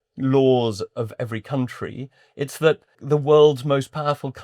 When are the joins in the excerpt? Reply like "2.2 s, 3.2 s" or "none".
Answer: 3.0 s